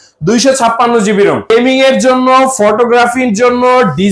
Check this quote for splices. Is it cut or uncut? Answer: cut